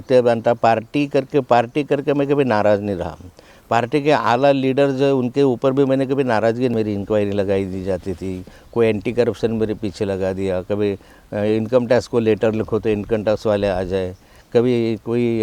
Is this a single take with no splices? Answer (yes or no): no